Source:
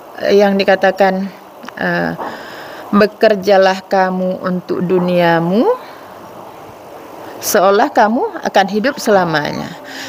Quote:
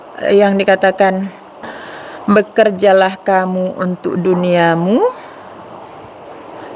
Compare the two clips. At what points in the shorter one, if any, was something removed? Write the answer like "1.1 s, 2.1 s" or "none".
1.6 s

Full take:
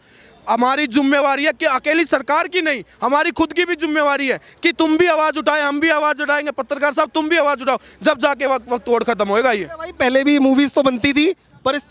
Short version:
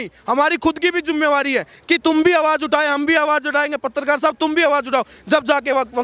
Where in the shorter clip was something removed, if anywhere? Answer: none

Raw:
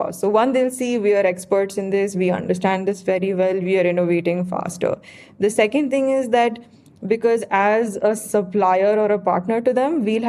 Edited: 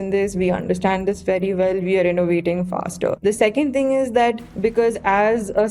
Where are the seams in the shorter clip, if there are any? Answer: 3.2 s, 4.5 s

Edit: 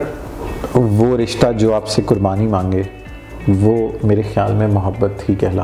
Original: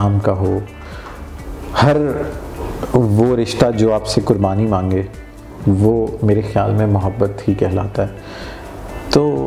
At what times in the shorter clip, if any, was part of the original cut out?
none

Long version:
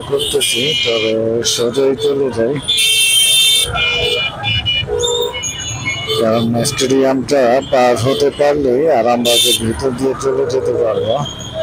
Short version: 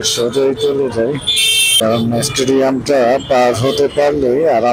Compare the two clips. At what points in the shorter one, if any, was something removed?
1.8 s

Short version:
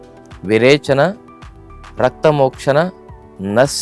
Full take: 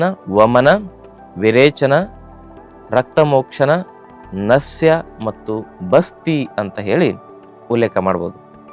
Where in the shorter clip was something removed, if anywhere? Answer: none

